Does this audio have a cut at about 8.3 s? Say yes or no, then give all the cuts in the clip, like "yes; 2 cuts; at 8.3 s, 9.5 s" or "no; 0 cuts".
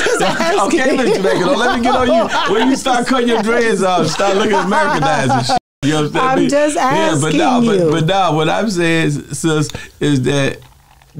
no; 0 cuts